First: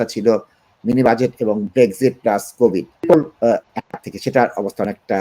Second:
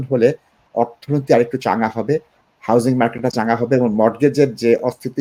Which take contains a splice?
first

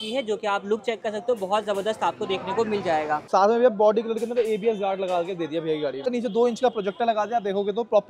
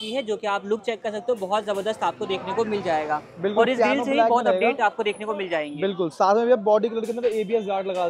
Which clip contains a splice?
first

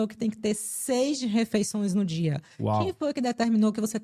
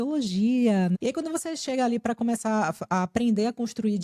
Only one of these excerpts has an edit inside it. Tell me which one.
second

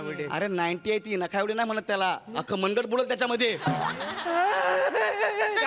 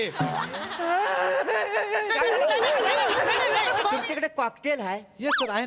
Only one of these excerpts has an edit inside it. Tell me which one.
second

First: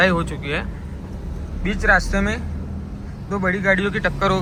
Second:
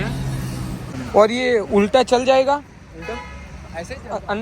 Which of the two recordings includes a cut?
second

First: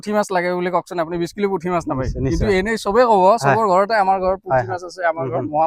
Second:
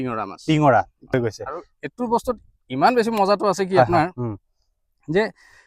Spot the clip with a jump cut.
second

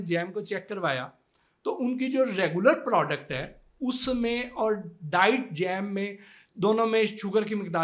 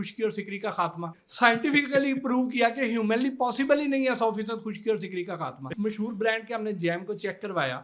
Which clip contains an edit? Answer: second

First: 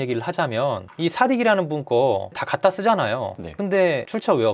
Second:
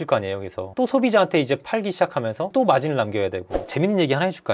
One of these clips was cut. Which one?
second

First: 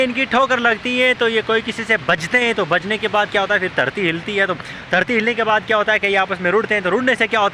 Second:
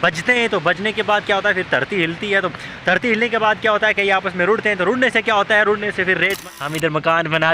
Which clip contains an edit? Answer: second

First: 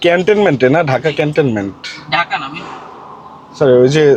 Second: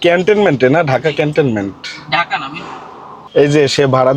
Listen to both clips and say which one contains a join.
second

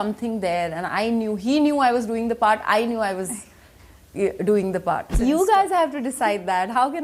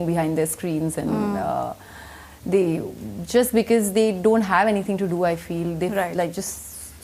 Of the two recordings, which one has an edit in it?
first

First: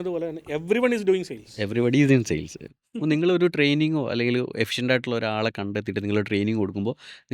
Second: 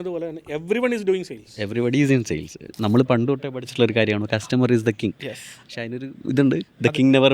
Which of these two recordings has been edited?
second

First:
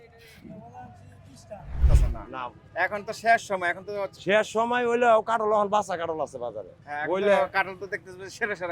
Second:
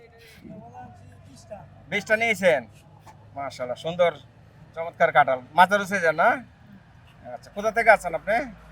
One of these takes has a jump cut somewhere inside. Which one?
first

